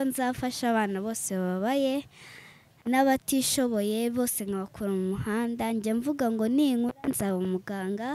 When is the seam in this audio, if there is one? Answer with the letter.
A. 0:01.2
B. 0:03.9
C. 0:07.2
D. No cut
D